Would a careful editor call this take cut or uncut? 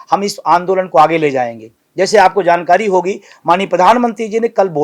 uncut